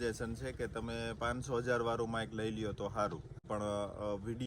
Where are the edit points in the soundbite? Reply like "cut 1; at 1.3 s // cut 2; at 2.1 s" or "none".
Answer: cut 1; at 3.4 s